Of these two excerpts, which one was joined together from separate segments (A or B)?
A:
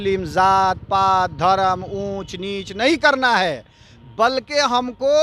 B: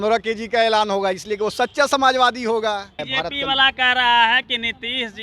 B